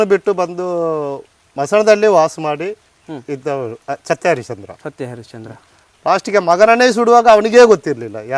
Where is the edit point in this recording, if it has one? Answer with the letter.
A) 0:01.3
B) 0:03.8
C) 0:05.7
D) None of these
B